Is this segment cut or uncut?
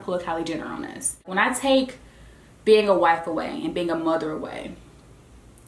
cut